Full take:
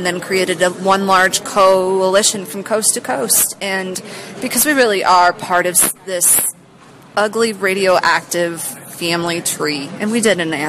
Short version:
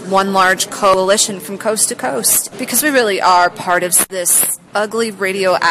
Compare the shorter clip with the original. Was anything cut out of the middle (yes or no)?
yes